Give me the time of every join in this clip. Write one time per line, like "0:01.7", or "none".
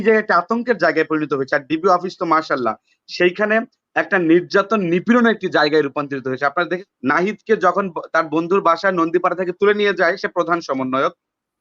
0:06.8